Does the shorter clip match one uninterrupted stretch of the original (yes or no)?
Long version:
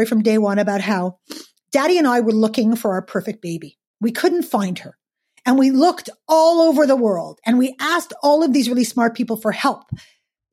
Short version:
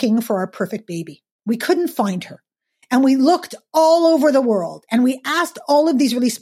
yes